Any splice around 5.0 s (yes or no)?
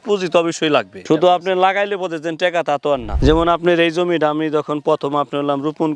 no